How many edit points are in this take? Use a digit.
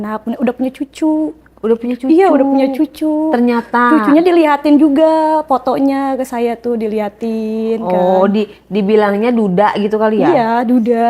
0